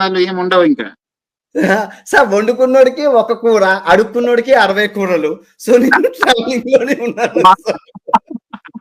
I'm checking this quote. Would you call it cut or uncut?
uncut